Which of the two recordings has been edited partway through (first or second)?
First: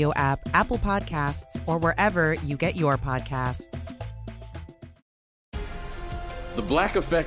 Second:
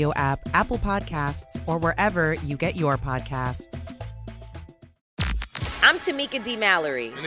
second